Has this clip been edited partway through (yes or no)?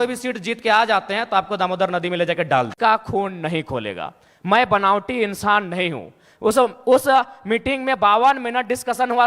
yes